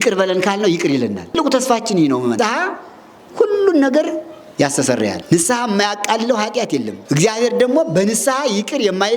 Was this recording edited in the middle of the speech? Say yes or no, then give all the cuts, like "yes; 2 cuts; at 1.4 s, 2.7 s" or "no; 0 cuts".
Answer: yes; 4 cuts; at 1.4 s, 2.4 s, 5.2 s, 6.9 s